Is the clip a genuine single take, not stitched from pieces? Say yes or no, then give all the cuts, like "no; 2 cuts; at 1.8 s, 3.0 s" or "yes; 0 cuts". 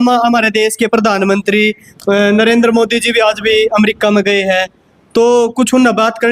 yes; 0 cuts